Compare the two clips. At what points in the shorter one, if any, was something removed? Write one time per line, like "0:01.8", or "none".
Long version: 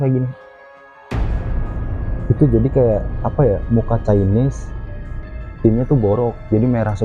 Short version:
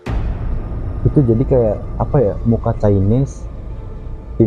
0:01.0